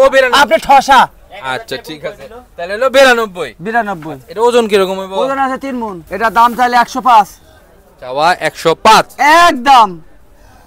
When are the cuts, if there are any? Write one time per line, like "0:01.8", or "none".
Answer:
0:06.0